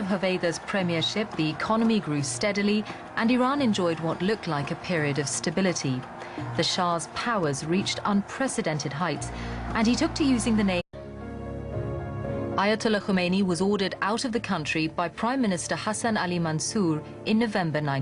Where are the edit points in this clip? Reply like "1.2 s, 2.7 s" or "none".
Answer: none